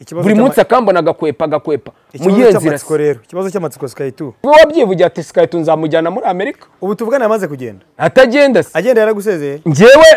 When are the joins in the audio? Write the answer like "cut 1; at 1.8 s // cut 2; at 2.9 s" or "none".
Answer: cut 1; at 4.3 s